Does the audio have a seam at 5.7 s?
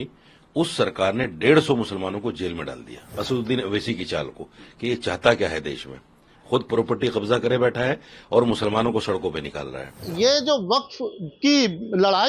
no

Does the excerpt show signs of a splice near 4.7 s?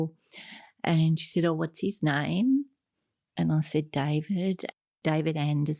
yes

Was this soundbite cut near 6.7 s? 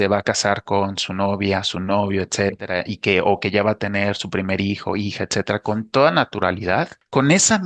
no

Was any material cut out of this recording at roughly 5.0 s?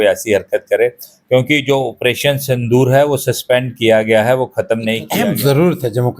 yes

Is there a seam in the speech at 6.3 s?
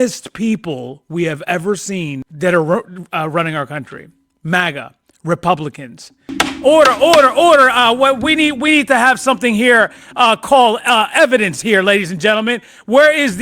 yes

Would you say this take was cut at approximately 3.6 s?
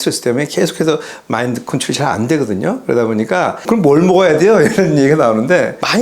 yes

